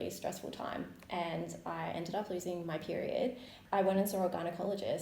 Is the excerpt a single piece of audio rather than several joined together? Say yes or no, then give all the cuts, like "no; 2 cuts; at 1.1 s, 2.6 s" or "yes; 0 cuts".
no; 1 cut; at 3.6 s